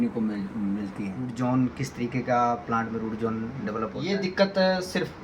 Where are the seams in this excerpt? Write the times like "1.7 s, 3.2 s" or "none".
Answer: 1.2 s, 4.0 s